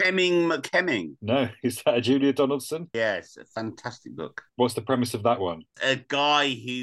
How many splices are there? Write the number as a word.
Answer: four